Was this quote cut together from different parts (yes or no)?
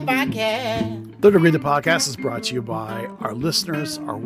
yes